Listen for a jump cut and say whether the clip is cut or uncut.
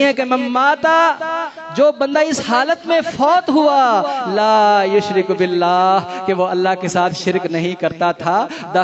uncut